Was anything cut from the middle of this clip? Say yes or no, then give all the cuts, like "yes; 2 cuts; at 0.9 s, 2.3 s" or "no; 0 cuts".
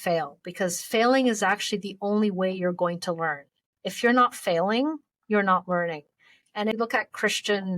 yes; 1 cut; at 6.7 s